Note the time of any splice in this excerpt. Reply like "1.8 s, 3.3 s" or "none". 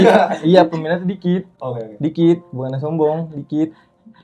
none